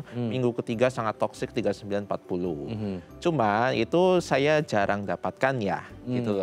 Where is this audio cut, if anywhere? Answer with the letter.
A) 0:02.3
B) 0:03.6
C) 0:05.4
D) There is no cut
D